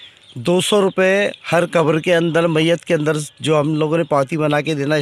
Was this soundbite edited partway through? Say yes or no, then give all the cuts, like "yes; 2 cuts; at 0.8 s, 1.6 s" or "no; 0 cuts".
no; 0 cuts